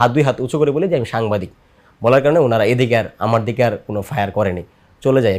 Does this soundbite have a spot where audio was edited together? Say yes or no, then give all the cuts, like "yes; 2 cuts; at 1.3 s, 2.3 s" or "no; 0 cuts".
no; 0 cuts